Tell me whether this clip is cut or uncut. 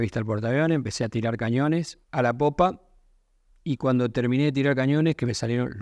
cut